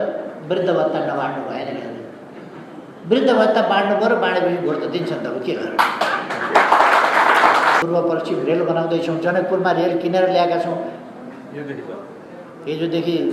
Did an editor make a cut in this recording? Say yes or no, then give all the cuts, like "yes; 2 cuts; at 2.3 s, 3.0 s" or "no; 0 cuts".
yes; 1 cut; at 7.8 s